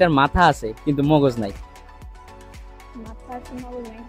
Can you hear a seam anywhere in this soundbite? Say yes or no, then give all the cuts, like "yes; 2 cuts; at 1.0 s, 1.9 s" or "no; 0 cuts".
no; 0 cuts